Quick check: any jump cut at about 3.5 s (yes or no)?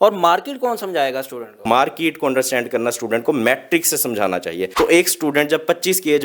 no